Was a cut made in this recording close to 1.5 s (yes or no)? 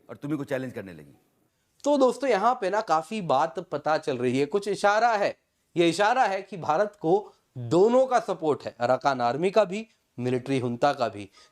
yes